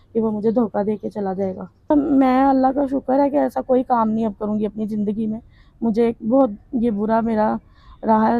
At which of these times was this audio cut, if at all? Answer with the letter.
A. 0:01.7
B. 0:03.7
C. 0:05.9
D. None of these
A